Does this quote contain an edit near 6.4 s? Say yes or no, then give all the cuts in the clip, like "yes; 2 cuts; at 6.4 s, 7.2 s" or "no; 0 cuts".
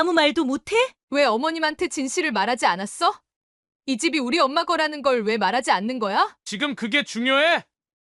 yes; 2 cuts; at 1.0 s, 6.4 s